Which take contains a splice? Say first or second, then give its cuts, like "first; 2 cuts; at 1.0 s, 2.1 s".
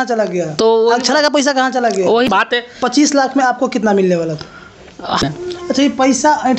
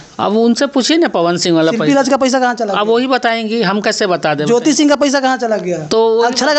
first; 2 cuts; at 2.3 s, 5.2 s